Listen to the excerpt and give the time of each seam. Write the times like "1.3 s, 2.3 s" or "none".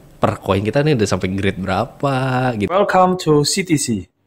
2.7 s